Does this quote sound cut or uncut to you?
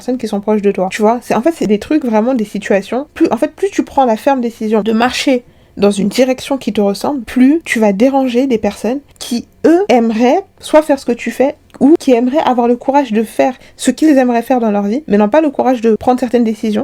uncut